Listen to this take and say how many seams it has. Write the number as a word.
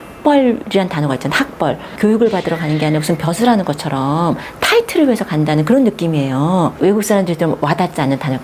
two